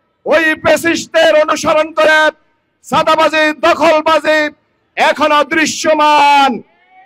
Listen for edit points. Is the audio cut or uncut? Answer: uncut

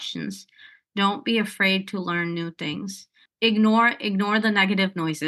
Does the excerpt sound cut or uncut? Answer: uncut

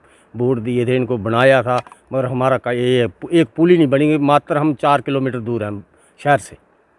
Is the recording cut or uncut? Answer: uncut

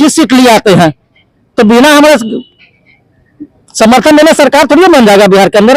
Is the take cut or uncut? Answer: uncut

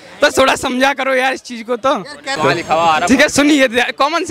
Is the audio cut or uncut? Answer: cut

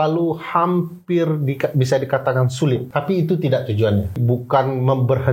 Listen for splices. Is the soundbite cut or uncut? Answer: cut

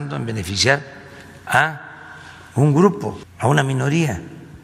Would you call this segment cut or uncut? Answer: cut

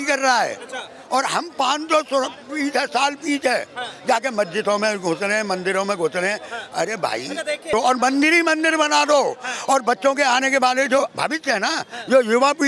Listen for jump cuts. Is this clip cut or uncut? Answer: cut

